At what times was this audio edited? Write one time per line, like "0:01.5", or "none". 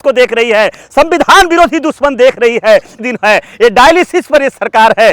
0:02.9